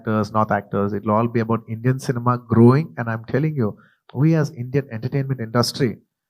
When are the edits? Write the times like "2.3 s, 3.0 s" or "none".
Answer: 3.9 s